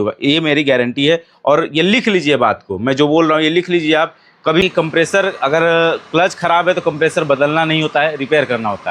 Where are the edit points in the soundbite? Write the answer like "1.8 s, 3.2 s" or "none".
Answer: 4.6 s